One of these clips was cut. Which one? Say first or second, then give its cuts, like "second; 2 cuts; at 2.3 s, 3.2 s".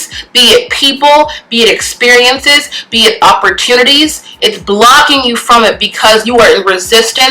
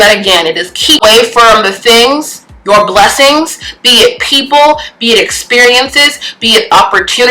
second; 1 cut; at 1.0 s